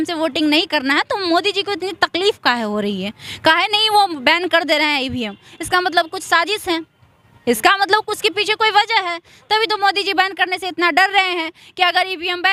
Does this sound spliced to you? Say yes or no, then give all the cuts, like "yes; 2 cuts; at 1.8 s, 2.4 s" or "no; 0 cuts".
no; 0 cuts